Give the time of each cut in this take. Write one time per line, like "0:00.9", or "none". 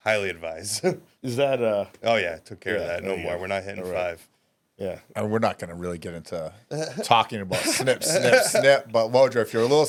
none